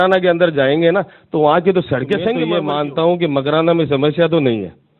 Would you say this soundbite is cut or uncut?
cut